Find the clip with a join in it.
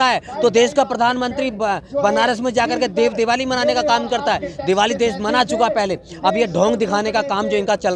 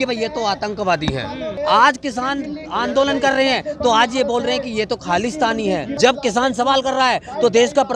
second; 2 cuts; at 1.5 s, 5.9 s

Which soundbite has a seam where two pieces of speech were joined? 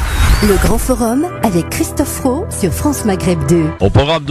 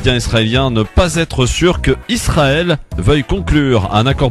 first; 1 cut; at 2.1 s

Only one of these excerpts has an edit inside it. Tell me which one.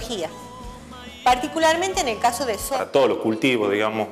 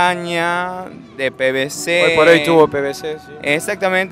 first; 1 cut; at 2.6 s

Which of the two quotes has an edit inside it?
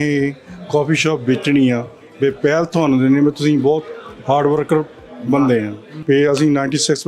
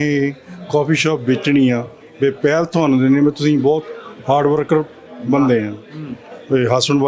first; 1 cut; at 5.9 s

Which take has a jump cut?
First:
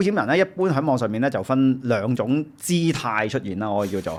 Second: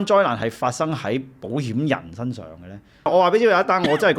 second; 1 cut; at 3.1 s

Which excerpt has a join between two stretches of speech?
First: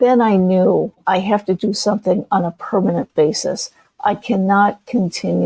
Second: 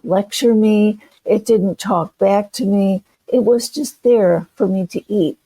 first; 1 cut; at 1.0 s

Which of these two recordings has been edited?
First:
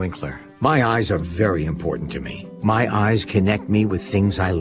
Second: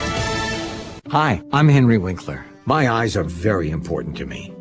second; 1 cut; at 0.9 s

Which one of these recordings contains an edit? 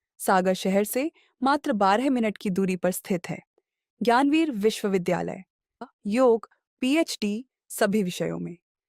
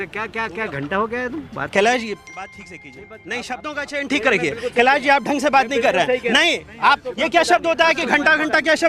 first; 1 cut; at 5.8 s

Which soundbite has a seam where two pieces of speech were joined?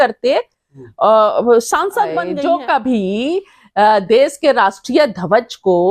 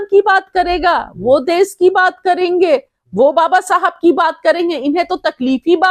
first; 1 cut; at 2.3 s

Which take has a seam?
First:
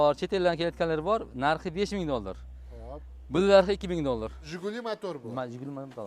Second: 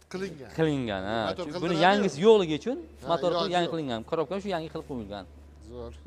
first; 1 cut; at 4.5 s

